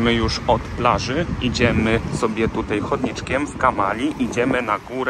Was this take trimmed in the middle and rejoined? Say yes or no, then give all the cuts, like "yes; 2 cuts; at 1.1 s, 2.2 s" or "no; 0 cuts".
no; 0 cuts